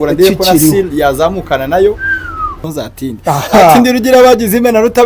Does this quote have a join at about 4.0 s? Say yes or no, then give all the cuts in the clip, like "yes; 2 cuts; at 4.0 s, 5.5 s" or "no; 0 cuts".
no; 1 cut; at 2.5 s